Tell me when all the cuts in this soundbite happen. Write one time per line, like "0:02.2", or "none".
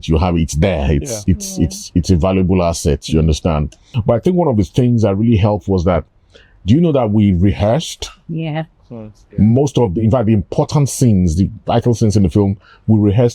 0:03.8